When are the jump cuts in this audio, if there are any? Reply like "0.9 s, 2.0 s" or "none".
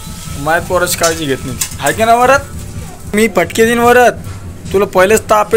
3.1 s